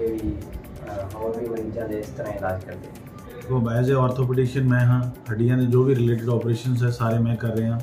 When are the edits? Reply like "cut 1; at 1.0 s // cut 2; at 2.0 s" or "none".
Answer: cut 1; at 3.5 s